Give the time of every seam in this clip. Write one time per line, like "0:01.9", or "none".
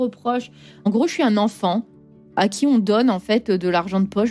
0:00.8
0:02.4